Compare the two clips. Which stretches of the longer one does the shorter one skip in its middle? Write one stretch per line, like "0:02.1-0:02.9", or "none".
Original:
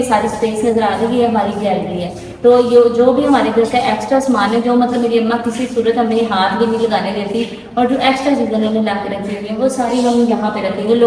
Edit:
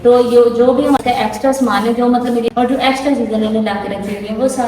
0:03.4-0:03.7
0:05.1-0:07.7